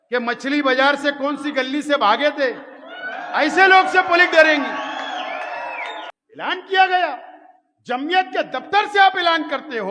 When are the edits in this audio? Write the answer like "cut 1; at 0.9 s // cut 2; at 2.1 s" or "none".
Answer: cut 1; at 6.1 s